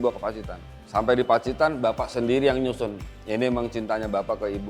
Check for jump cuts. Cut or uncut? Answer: cut